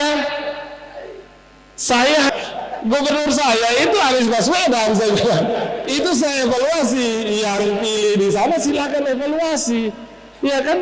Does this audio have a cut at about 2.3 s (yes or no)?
yes